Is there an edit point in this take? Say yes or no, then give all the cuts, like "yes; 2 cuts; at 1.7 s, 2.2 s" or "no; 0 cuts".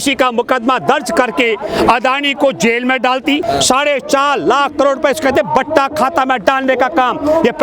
yes; 1 cut; at 3.4 s